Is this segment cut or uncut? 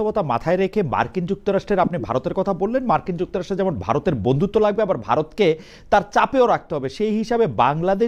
uncut